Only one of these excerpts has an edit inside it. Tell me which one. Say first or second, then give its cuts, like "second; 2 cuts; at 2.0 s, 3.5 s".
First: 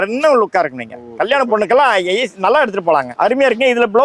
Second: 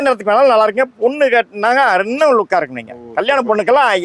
first; 1 cut; at 3.1 s